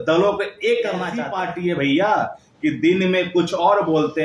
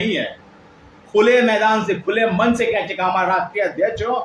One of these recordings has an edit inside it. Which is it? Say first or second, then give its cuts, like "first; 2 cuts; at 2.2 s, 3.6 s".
first; 1 cut; at 1.2 s